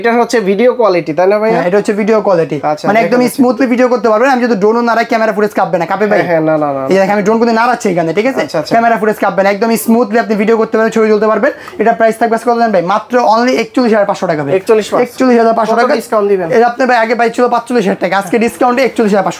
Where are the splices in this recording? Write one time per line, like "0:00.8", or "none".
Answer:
none